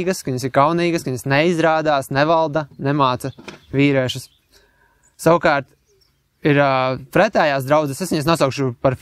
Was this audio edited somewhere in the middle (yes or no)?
no